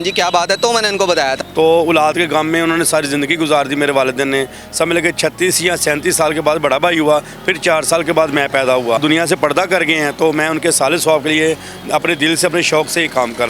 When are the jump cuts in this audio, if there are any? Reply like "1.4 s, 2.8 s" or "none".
1.4 s, 9.0 s

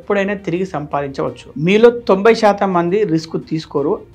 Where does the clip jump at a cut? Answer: 1.4 s

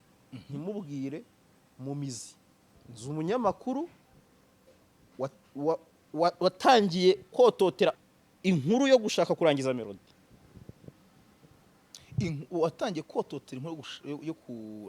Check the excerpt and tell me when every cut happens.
2.9 s, 8.0 s

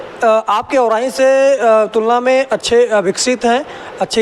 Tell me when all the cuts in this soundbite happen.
none

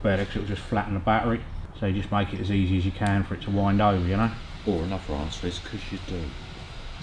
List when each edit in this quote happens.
none

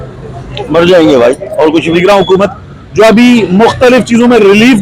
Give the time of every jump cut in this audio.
2.0 s

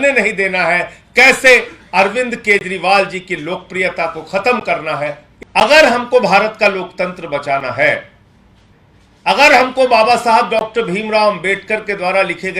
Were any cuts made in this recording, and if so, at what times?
5.3 s

